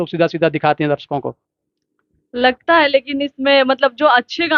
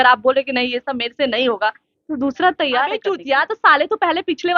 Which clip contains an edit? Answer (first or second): second